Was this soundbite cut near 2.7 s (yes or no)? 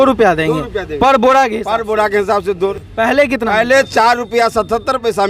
yes